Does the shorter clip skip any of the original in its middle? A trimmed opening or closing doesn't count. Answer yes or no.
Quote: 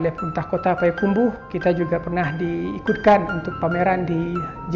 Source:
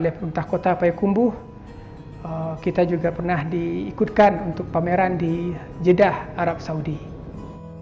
yes